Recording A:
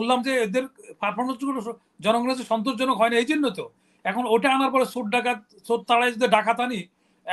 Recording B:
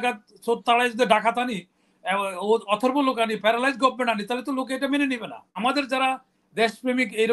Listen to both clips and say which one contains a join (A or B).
B